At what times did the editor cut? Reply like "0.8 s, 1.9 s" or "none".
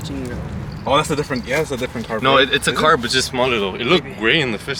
none